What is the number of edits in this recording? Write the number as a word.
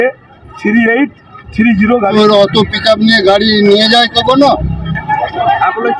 one